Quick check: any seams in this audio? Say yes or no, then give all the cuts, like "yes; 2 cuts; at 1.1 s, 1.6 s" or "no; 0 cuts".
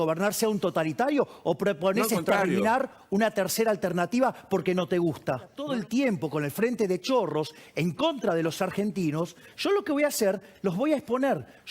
yes; 1 cut; at 5.6 s